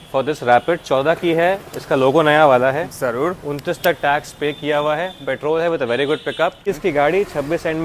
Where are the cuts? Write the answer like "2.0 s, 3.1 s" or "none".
6.6 s